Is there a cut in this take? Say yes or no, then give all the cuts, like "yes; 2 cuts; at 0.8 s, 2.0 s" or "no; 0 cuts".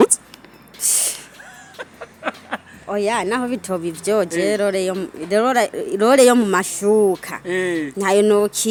no; 0 cuts